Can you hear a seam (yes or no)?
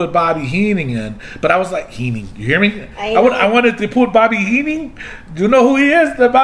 no